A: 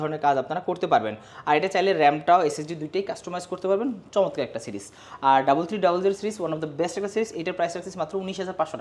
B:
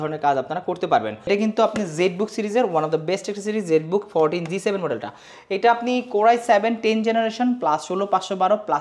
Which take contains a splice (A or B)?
B